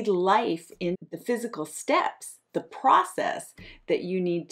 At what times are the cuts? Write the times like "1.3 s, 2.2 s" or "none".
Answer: 1.0 s